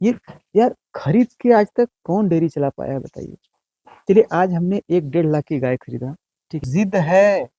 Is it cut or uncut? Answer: cut